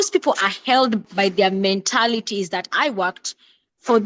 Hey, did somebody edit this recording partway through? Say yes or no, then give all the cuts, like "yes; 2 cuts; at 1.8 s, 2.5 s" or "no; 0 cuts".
yes; 1 cut; at 1.0 s